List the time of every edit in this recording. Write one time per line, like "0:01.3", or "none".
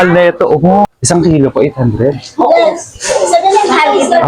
0:00.9